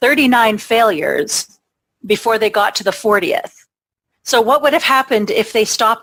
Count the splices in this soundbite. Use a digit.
0